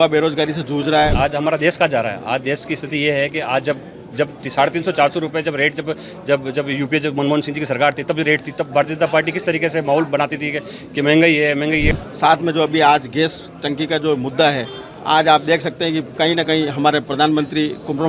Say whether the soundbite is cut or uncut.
cut